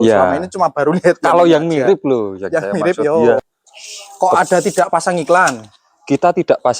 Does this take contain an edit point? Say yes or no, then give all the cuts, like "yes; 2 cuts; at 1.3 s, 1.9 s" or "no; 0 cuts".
yes; 1 cut; at 3.6 s